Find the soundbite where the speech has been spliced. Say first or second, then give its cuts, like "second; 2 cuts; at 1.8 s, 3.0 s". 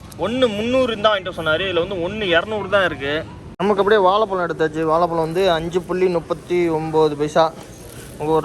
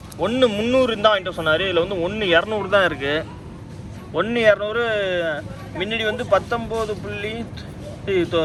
first; 1 cut; at 3.4 s